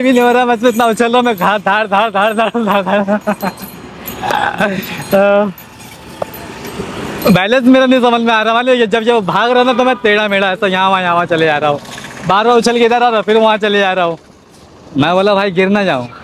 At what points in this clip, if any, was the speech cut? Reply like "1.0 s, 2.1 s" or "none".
none